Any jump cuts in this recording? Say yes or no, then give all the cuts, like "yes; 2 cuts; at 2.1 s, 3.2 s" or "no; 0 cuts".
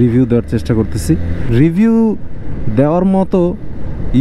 yes; 1 cut; at 1.4 s